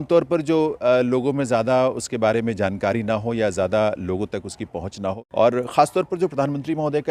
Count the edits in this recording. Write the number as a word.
one